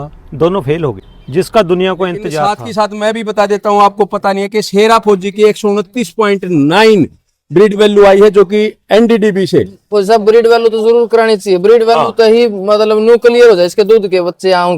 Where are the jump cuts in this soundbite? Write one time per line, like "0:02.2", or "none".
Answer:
0:01.1
0:02.4